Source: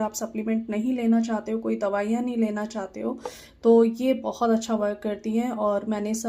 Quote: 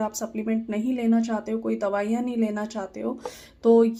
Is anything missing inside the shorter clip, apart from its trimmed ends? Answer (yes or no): no